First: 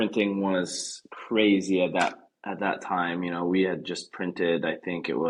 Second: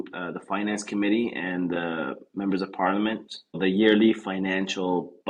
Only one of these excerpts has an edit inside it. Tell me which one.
second; 1 cut; at 3.6 s

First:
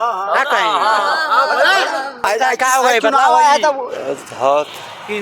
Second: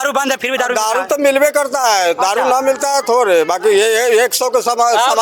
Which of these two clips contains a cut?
first; 1 cut; at 2.1 s

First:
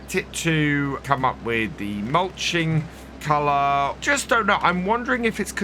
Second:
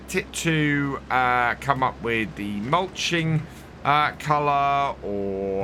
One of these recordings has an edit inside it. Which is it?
first; 3 cuts; at 1.0 s, 3.2 s, 4.0 s

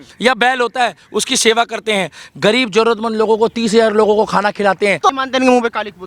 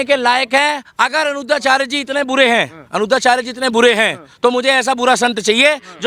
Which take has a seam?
first; 1 cut; at 5.1 s

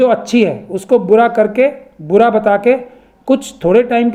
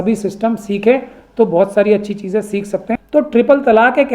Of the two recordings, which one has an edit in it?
second; 1 cut; at 2.9 s

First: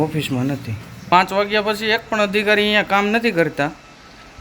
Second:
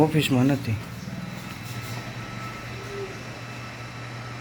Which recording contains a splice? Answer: first; 1 cut; at 1.0 s

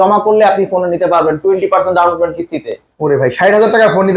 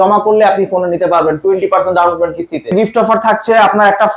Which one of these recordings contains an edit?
second; 1 cut; at 2.7 s

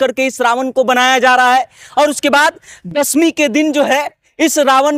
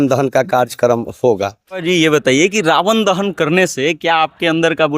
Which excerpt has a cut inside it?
second; 1 cut; at 1.8 s

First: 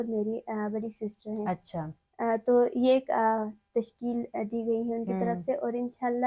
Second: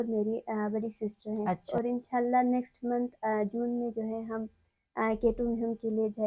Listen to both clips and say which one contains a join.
second; 1 cut; at 1.7 s

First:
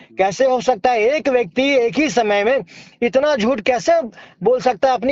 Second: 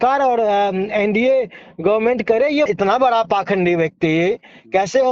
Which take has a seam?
second; 1 cut; at 2.7 s

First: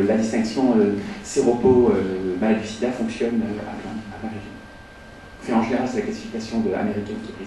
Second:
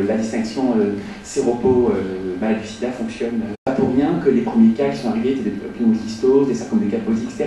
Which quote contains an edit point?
first; 1 cut; at 3.6 s

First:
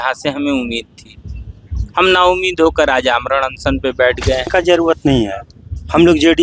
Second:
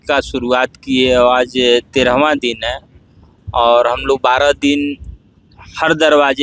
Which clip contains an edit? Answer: first; 1 cut; at 4.5 s

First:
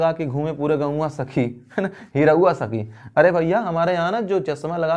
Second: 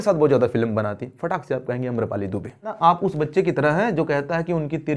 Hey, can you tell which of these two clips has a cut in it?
second; 1 cut; at 2.7 s

